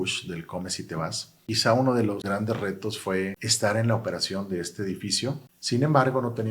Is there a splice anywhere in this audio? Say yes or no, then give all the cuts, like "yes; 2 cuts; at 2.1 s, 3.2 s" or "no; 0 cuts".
yes; 4 cuts; at 1.4 s, 2.2 s, 3.4 s, 5.5 s